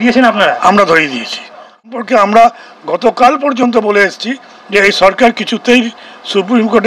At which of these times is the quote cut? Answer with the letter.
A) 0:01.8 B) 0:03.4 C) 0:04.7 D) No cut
A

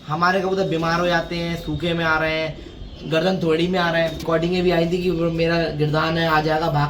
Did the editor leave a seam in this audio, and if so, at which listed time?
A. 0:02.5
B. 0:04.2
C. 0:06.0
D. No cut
B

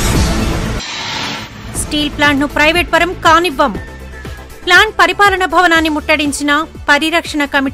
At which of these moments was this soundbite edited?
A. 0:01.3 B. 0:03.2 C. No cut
A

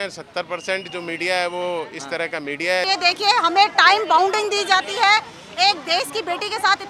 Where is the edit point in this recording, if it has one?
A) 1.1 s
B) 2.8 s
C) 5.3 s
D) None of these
B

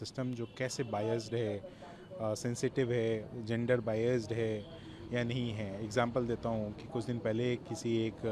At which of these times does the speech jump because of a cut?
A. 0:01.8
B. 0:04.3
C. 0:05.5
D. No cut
D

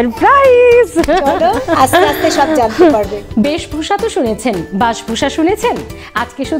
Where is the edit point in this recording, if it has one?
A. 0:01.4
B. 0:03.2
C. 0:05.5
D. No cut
B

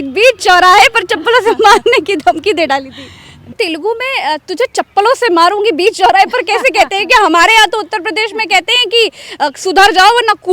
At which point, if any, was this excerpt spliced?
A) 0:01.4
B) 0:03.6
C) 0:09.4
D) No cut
B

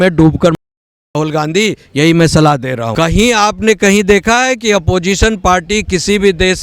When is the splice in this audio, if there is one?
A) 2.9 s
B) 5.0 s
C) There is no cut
A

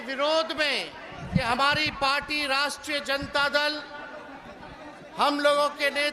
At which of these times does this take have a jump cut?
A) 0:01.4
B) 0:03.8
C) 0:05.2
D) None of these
A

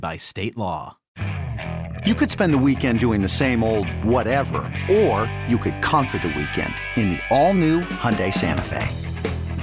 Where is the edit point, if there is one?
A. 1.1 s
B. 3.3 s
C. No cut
A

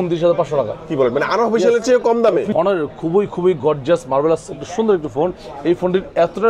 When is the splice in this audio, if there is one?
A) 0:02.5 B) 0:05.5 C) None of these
A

